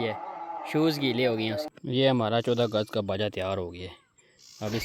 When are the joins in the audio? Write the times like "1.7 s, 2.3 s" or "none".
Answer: 1.7 s